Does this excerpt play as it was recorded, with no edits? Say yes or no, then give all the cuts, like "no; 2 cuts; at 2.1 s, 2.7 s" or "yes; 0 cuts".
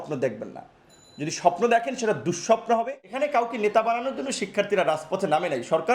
no; 1 cut; at 3.0 s